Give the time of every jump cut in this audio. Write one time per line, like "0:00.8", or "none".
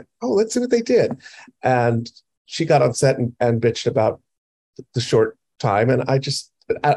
none